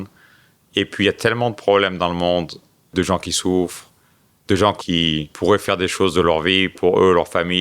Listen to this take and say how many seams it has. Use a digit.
2